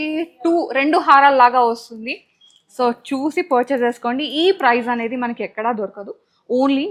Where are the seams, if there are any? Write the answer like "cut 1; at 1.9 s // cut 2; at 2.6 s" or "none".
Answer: none